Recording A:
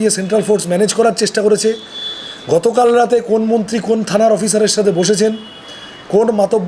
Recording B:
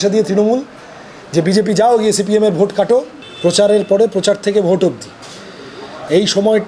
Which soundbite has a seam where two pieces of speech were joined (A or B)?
B